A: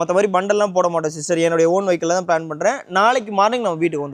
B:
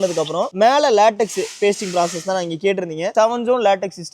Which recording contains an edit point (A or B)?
B